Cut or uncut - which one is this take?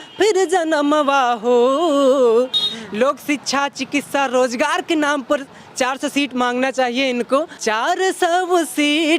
cut